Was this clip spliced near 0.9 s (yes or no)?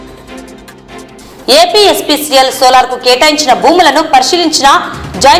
yes